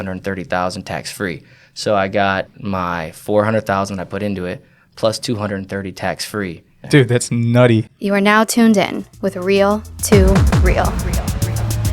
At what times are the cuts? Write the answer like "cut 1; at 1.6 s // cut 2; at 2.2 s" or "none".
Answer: cut 1; at 2.5 s // cut 2; at 6.7 s // cut 3; at 7.9 s